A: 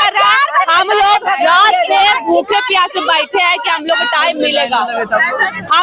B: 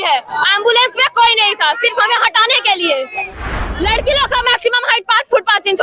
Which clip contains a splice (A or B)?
B